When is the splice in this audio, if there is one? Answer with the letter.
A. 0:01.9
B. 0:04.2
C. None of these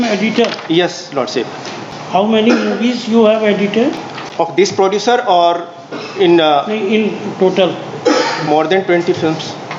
C